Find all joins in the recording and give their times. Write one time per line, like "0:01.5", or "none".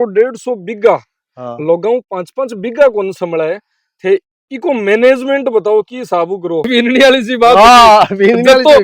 0:06.7